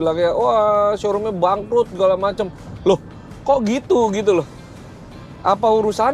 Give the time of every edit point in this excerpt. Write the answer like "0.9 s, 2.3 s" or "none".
none